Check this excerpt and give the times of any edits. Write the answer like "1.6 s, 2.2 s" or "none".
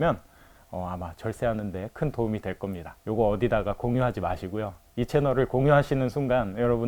2.9 s